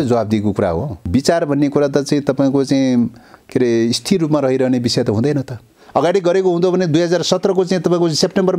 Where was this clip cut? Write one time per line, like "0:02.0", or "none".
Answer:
0:00.9
0:05.7